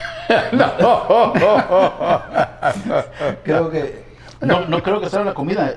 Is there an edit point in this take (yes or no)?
no